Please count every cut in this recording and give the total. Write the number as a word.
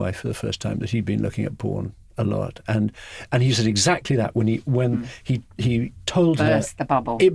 zero